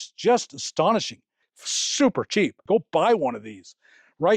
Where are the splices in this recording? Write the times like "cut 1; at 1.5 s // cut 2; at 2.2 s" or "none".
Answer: cut 1; at 2.6 s